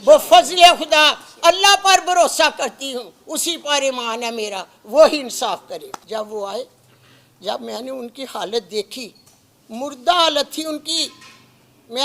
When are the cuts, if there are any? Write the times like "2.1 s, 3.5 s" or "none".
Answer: 5.9 s

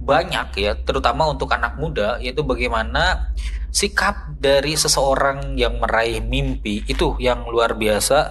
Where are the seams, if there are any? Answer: none

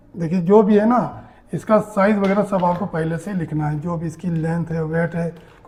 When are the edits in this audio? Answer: none

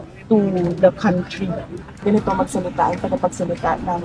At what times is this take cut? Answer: 2.0 s

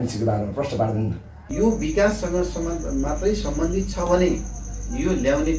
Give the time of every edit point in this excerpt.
1.4 s

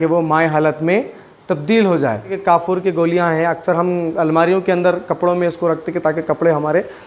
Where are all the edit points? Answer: 2.3 s

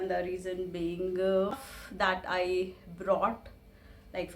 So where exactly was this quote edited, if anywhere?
1.7 s

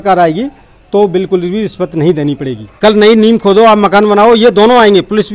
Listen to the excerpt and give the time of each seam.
2.7 s

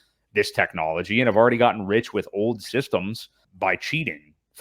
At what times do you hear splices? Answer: 3.4 s

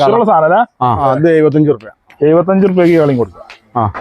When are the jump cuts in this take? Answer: 1.0 s

